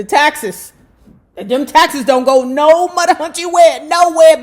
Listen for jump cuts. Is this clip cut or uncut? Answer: uncut